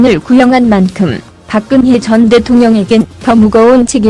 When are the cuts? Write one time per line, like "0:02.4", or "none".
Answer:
none